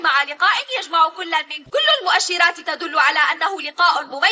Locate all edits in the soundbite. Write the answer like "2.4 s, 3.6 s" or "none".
1.6 s

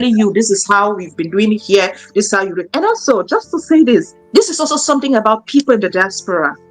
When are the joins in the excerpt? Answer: 2.6 s

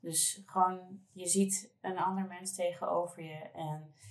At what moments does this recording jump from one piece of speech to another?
none

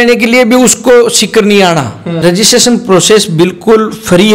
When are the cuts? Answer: 2.0 s

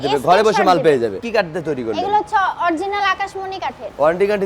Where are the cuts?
1.2 s

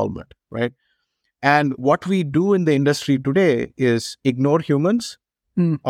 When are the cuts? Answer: none

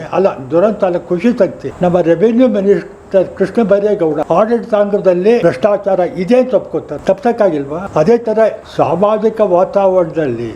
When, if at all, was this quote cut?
1.6 s, 4.2 s, 5.4 s, 6.9 s, 7.8 s, 8.6 s

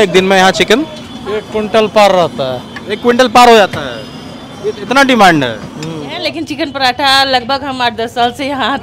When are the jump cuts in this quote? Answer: 6.2 s

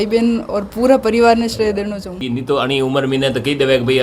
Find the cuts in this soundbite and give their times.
2.2 s

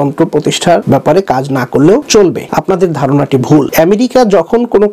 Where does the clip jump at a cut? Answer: 0.8 s, 2.3 s, 3.7 s

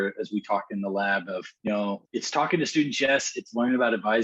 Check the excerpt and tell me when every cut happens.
1.5 s, 2.0 s

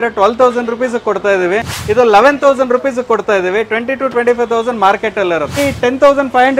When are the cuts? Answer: 1.7 s, 5.6 s

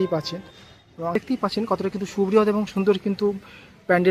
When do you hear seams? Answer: 1.2 s

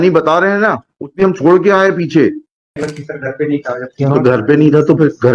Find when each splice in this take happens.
2.8 s

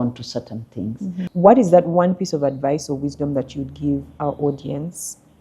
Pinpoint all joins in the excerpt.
1.3 s

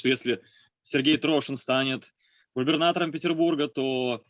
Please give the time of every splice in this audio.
none

